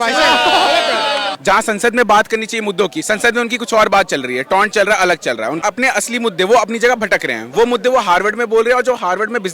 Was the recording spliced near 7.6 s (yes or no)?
no